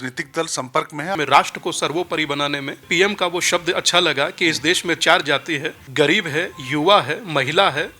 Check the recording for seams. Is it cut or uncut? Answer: cut